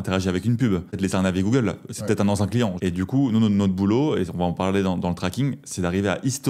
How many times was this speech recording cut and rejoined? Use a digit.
2